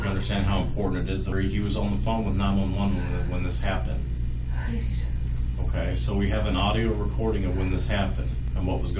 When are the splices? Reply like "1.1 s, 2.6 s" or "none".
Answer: 1.3 s